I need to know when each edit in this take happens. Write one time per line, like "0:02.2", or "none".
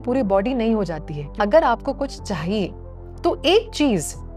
0:01.3
0:03.0